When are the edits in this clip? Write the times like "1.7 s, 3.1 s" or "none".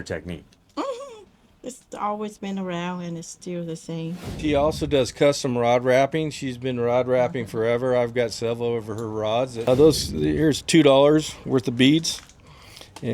4.4 s, 9.7 s

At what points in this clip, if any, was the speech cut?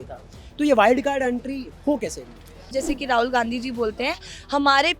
2.7 s

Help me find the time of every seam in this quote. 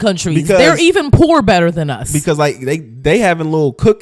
none

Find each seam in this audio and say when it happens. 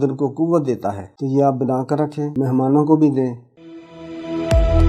2.3 s, 3.5 s

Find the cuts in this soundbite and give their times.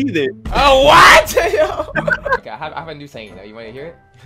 2.4 s

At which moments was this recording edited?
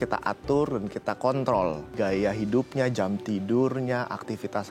1.9 s

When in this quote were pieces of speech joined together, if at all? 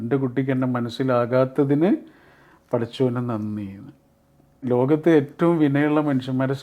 4.7 s

